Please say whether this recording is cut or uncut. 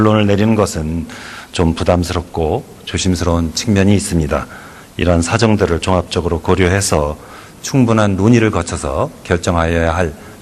cut